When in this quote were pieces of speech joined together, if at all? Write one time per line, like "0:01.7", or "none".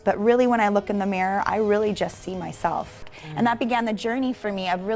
0:03.1